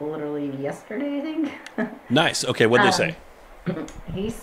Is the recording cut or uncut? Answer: uncut